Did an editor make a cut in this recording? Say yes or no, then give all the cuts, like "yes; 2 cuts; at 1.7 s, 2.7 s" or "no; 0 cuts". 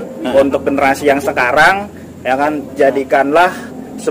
no; 0 cuts